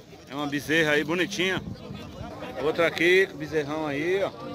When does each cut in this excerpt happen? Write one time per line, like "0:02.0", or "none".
0:02.2